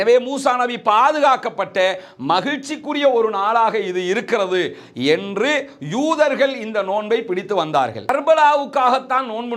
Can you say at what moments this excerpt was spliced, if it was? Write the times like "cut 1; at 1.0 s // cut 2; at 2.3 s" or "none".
cut 1; at 8.1 s